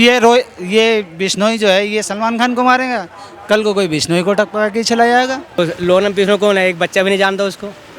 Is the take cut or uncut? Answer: cut